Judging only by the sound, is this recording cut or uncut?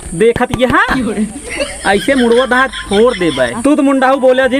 cut